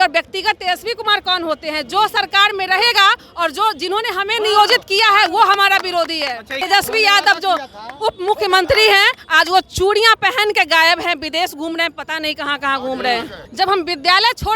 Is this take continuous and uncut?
no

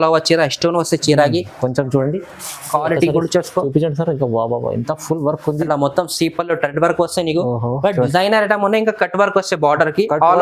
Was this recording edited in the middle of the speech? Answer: yes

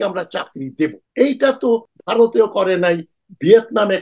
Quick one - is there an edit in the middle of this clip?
yes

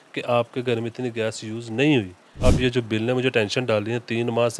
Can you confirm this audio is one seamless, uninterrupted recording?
no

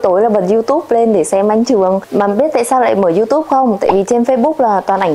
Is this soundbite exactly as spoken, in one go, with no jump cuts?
yes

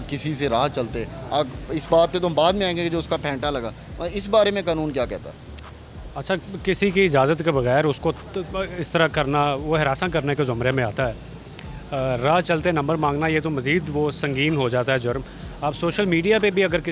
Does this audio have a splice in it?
no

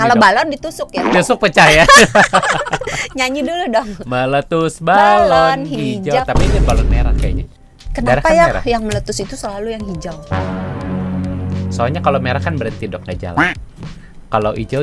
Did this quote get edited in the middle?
no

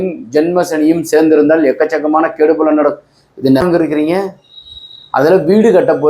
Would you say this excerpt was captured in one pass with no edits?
no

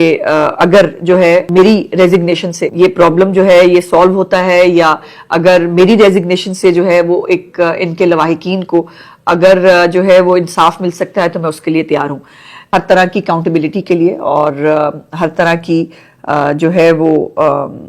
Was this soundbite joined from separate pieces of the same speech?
yes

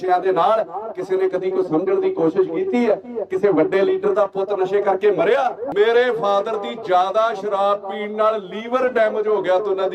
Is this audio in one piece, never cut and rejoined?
no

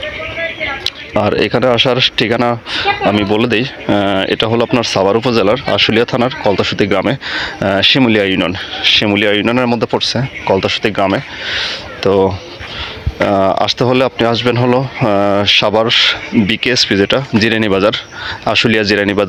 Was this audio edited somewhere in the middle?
no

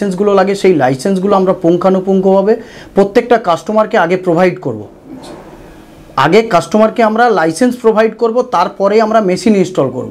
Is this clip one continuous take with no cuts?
yes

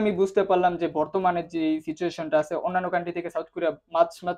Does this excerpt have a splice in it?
no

